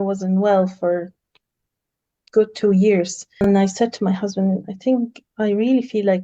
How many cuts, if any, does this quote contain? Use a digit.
1